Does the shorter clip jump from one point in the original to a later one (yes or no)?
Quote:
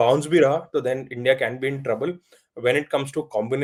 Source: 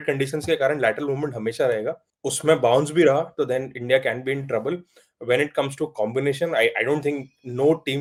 no